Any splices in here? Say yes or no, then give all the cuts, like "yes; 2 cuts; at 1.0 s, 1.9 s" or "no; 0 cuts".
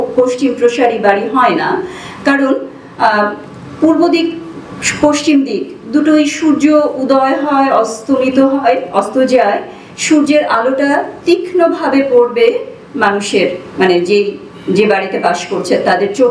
no; 0 cuts